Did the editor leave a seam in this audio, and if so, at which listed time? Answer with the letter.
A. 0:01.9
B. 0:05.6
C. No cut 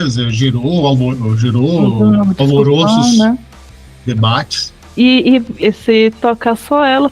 B